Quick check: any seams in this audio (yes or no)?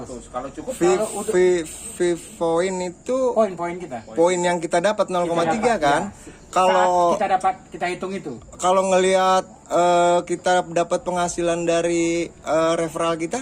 no